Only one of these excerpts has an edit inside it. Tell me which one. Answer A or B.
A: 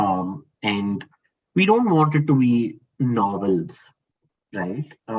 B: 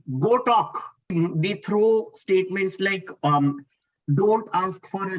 B